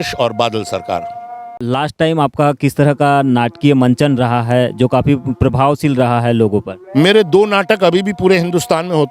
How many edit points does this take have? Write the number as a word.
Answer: one